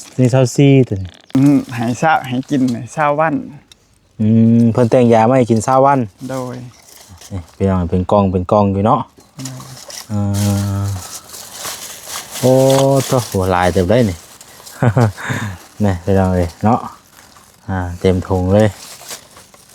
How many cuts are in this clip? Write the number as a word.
one